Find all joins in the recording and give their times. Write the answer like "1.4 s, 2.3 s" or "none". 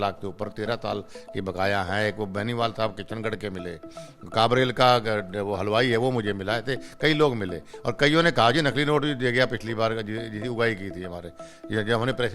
none